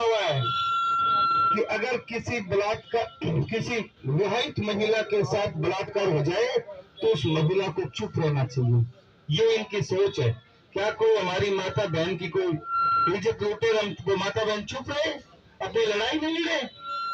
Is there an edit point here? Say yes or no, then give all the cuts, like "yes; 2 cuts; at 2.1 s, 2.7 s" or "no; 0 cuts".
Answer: no; 0 cuts